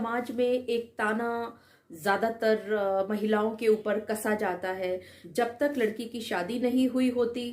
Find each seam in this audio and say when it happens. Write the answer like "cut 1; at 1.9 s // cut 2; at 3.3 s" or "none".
cut 1; at 5.2 s